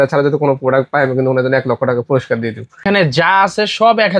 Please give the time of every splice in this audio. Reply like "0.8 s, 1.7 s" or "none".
2.8 s